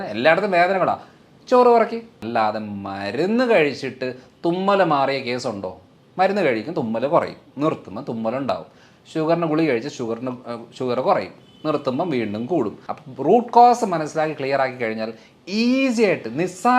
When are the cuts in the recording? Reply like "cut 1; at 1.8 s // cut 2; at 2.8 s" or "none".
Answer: cut 1; at 2.1 s // cut 2; at 12.8 s